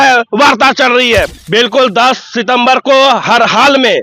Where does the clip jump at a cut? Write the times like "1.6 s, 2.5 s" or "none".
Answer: 1.4 s